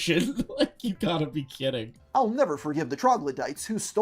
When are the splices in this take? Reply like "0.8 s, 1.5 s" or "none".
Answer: 1.9 s